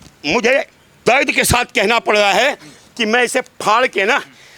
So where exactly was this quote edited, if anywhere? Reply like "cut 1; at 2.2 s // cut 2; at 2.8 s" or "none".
cut 1; at 0.9 s